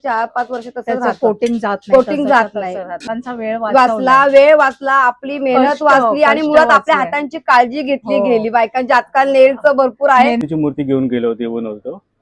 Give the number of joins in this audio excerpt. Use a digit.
2